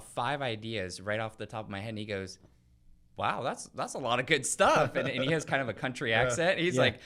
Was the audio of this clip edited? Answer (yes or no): no